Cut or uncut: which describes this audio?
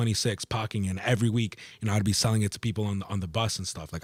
uncut